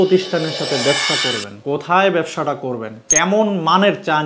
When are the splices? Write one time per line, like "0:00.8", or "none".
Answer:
none